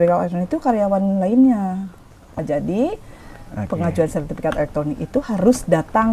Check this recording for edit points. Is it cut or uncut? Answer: cut